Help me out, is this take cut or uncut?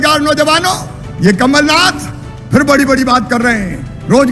uncut